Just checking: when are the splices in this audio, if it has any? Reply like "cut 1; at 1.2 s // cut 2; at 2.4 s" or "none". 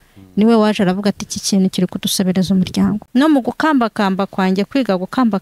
cut 1; at 3.0 s